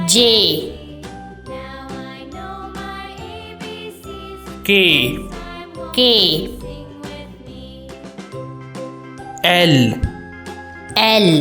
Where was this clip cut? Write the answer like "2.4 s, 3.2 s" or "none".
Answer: 1.0 s, 4.3 s, 7.2 s, 9.4 s